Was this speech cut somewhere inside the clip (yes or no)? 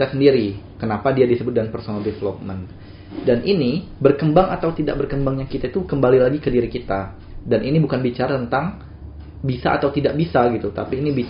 no